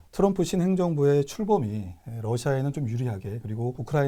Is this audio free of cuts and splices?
yes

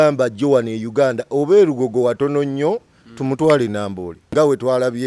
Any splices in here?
yes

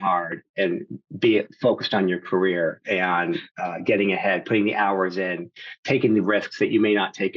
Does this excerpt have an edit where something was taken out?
no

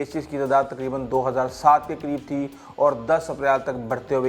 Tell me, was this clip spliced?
no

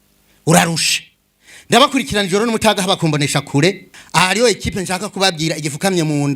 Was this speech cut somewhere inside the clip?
yes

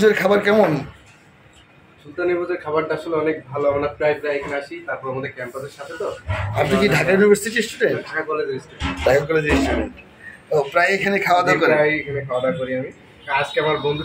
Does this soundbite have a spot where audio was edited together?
no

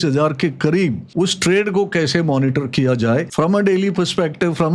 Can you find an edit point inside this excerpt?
yes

